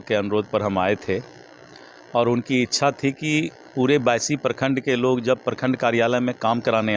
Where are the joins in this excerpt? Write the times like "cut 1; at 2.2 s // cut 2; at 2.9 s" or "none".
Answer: none